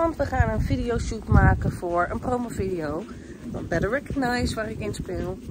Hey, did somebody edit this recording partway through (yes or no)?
no